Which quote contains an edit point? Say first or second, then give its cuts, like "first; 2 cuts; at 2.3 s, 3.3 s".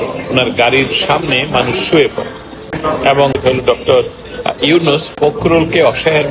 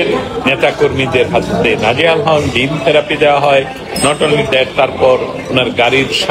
first; 1 cut; at 3.0 s